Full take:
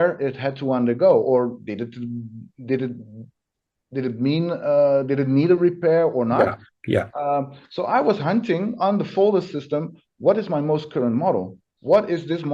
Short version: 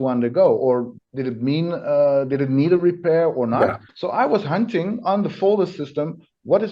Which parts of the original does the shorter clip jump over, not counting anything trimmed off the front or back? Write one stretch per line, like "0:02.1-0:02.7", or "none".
0:01.6-0:03.8
0:06.7-0:07.6